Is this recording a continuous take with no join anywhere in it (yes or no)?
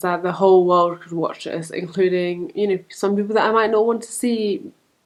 yes